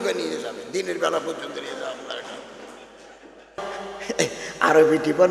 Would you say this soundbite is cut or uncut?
cut